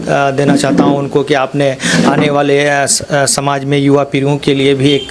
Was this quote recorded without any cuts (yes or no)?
yes